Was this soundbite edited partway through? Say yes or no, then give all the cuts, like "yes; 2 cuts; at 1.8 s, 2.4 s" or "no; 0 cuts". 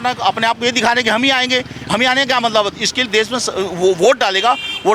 no; 0 cuts